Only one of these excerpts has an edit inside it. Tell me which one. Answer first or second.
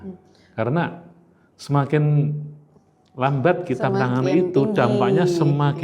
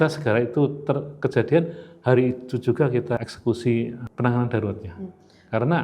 second